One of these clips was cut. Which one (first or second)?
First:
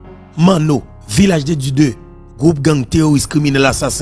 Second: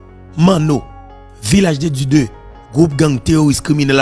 first